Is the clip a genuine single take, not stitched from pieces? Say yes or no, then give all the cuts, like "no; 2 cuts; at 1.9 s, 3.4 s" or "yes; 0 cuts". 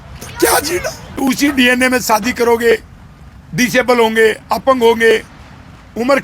no; 1 cut; at 1.2 s